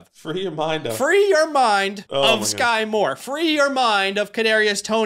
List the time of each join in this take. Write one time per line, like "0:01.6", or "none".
0:02.0